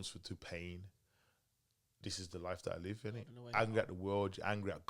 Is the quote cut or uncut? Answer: cut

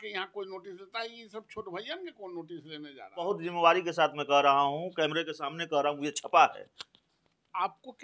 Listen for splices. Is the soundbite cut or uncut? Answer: cut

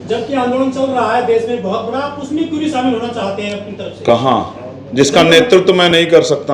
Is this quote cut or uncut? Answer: uncut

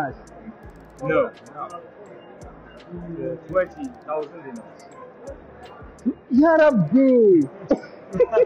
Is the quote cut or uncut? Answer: uncut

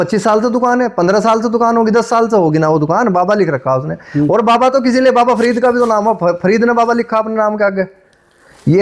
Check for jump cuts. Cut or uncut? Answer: uncut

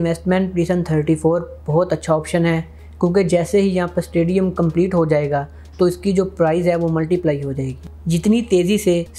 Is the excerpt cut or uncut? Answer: uncut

